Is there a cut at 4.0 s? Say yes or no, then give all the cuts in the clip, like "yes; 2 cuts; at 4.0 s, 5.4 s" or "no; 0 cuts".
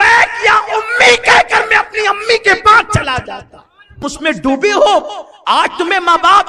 yes; 1 cut; at 4.0 s